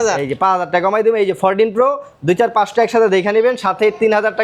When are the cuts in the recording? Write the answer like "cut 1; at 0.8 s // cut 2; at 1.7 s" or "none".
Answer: none